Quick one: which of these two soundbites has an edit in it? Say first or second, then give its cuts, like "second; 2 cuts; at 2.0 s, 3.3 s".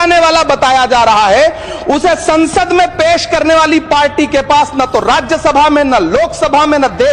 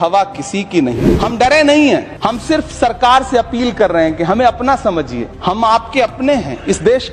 second; 3 cuts; at 0.9 s, 2.1 s, 5.2 s